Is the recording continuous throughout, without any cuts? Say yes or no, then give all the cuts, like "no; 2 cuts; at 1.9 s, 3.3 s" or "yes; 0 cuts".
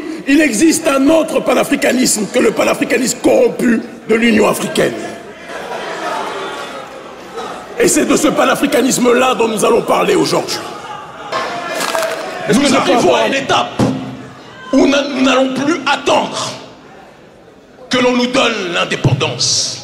no; 1 cut; at 11.3 s